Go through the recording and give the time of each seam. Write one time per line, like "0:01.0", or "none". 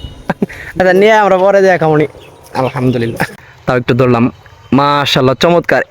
0:03.4